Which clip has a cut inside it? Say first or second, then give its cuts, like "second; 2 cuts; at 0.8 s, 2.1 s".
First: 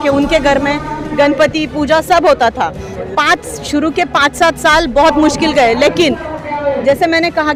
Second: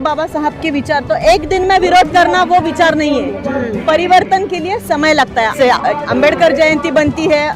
second; 1 cut; at 5.5 s